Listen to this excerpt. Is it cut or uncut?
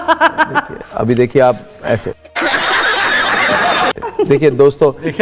uncut